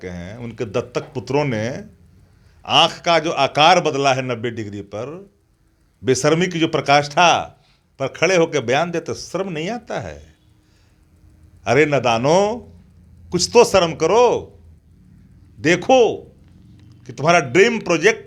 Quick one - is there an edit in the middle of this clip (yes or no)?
no